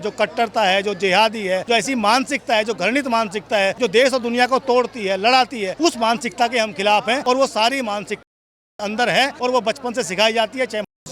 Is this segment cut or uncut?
cut